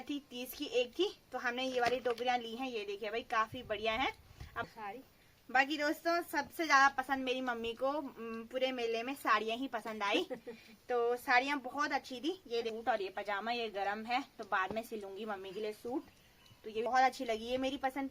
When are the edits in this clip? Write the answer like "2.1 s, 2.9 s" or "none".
4.7 s, 12.7 s, 16.8 s